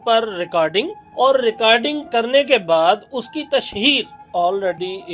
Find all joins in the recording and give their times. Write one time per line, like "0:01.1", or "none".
0:01.0
0:02.0
0:04.2